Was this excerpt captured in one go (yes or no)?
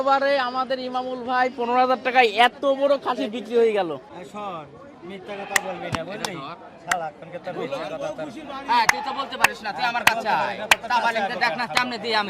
no